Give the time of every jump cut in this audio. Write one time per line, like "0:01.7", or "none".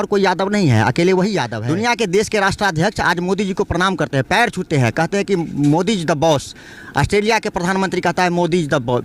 0:01.5